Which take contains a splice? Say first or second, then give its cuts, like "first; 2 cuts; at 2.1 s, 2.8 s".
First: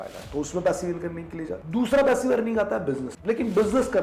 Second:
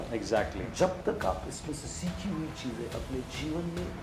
first; 2 cuts; at 1.6 s, 3.1 s